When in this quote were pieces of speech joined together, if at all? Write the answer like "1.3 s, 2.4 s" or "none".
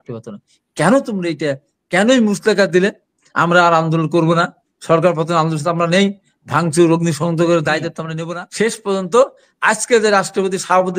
8.1 s